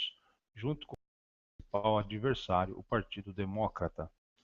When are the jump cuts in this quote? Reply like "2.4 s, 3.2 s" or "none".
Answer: 2.8 s